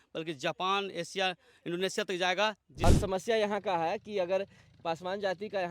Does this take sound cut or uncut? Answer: cut